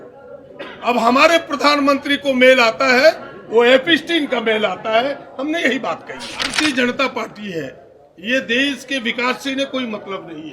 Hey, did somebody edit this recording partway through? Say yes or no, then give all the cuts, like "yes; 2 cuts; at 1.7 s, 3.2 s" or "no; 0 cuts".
yes; 1 cut; at 6.5 s